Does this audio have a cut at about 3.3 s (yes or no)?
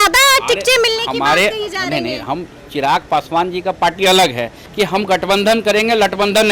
no